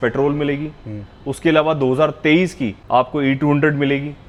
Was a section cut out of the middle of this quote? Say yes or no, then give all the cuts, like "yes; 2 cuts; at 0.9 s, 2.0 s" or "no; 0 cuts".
no; 0 cuts